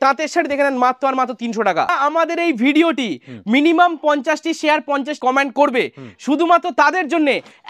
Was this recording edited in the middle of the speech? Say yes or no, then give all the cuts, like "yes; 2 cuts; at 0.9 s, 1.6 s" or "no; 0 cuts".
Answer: yes; 2 cuts; at 1.9 s, 5.2 s